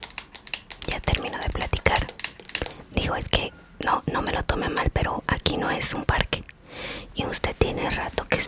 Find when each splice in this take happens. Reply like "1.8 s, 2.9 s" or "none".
none